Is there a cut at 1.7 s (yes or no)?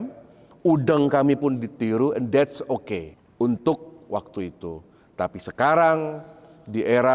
no